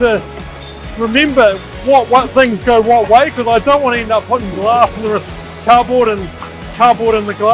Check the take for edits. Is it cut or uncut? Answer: uncut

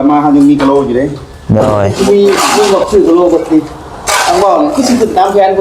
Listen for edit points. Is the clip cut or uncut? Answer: cut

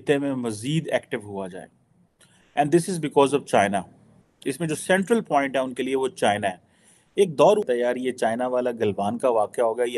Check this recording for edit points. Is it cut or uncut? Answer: cut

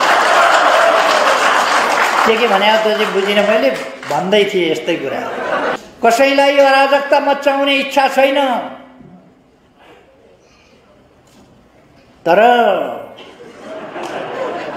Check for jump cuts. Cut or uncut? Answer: cut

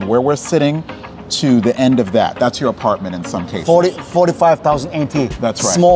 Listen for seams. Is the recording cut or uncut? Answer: uncut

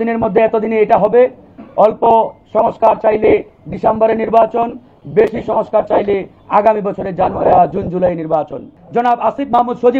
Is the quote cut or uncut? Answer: cut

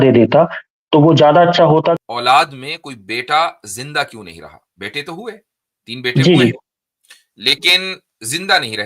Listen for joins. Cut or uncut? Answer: cut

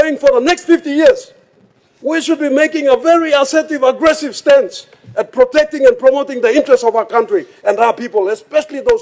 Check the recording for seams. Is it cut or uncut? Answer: uncut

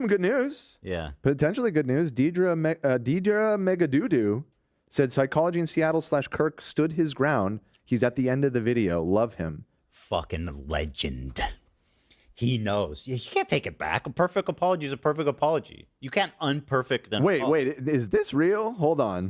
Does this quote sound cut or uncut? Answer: uncut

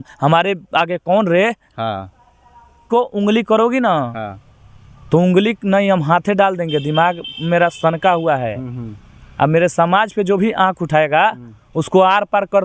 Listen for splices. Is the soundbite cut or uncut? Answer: cut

